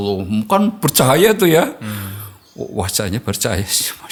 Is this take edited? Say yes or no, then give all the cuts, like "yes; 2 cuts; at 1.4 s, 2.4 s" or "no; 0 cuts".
no; 0 cuts